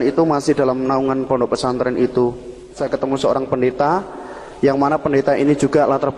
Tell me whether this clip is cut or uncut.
cut